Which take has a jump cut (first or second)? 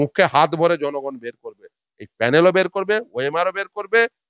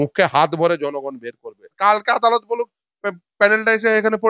second